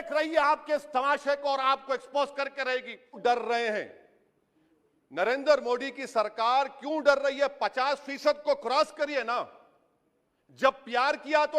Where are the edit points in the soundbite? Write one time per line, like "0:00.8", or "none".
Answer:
0:03.2